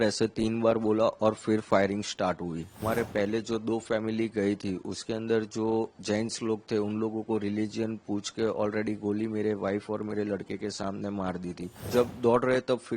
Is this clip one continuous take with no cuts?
no; 2 cuts; at 2.8 s, 11.8 s

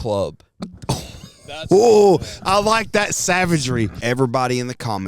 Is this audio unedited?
no; 1 cut; at 4.0 s

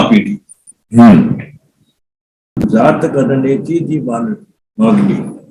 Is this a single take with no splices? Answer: no; 1 cut; at 2.7 s

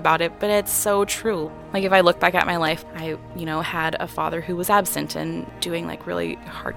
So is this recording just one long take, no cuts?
no; 3 cuts; at 1.4 s, 2.8 s, 5.5 s

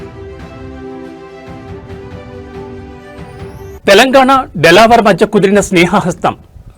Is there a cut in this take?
yes; 1 cut; at 3.7 s

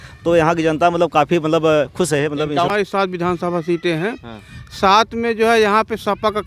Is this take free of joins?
no; 1 cut; at 2.7 s

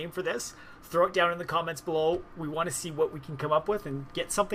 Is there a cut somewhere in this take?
no; 0 cuts

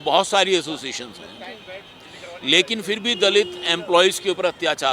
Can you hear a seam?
no; 0 cuts

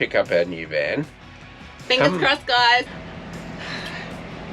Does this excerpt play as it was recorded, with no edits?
no; 1 cut; at 2.9 s

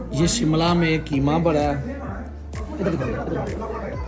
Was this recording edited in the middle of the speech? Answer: no; 0 cuts

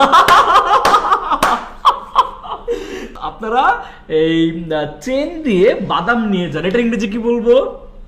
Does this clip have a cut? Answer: yes; 1 cut; at 3.1 s

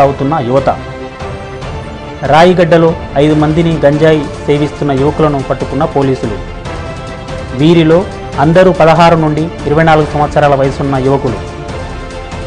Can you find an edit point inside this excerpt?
no; 0 cuts

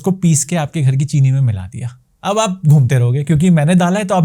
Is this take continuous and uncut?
yes; 0 cuts

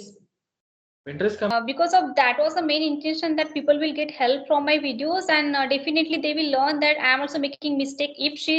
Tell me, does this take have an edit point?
yes; 1 cut; at 1.5 s

